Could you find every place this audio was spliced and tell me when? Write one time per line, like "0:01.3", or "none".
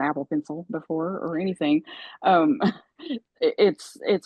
none